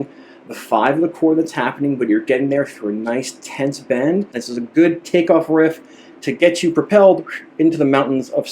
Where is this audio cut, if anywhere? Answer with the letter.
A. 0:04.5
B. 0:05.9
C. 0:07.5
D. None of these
A